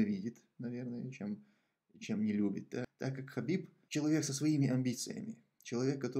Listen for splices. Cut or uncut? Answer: cut